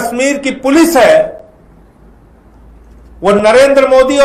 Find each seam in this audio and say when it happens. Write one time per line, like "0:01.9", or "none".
none